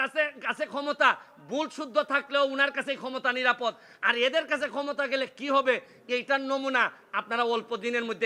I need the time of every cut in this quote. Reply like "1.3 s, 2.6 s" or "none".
none